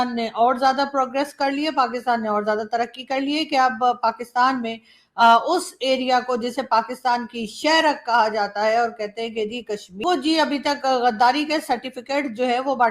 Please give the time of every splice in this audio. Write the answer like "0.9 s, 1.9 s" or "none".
10.0 s